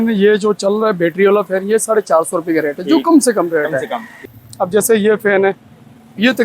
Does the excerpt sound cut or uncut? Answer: cut